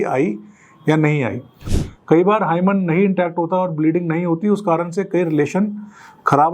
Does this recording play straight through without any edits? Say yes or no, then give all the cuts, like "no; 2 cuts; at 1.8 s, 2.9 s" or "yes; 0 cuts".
no; 1 cut; at 1.6 s